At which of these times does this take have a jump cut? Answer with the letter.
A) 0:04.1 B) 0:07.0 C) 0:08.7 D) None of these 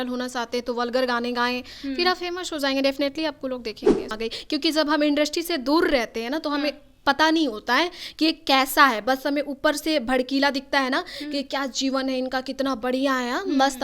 A